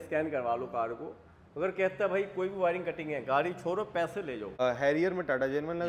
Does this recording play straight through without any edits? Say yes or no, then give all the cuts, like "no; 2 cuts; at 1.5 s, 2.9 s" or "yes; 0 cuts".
no; 1 cut; at 4.6 s